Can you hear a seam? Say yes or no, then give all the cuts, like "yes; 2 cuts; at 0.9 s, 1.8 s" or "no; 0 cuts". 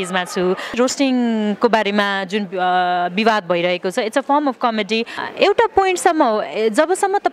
yes; 2 cuts; at 0.7 s, 5.2 s